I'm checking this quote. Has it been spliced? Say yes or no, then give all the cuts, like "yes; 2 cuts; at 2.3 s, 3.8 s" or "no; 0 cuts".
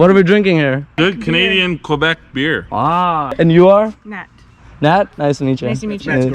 yes; 2 cuts; at 0.9 s, 3.3 s